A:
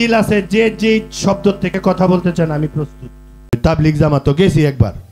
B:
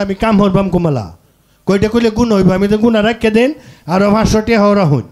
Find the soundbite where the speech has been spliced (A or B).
A